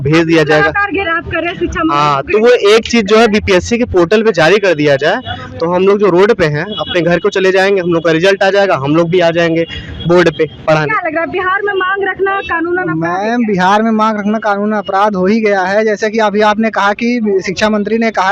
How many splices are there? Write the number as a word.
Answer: zero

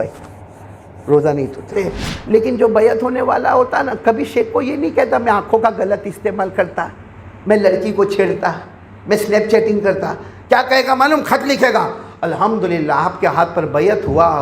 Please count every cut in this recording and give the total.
one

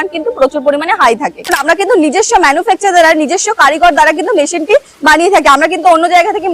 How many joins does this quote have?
one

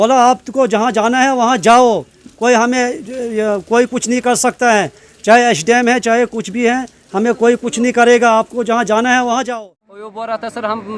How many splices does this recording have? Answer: one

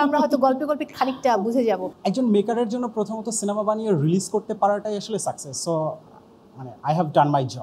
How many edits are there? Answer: one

